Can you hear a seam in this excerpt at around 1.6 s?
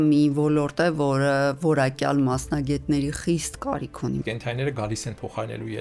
no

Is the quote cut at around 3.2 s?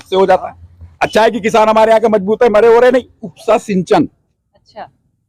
yes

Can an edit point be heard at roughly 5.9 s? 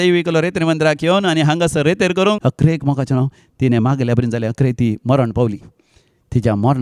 no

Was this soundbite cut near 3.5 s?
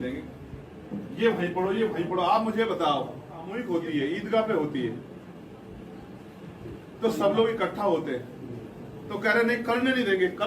yes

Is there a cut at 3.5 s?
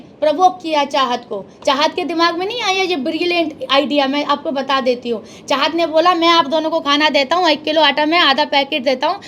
no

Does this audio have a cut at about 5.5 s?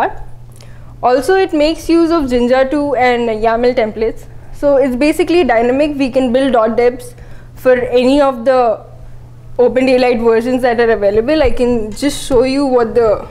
yes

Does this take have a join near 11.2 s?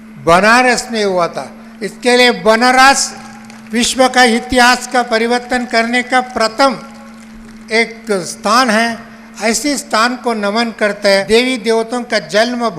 yes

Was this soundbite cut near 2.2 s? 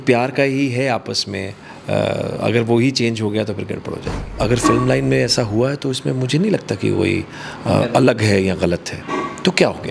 no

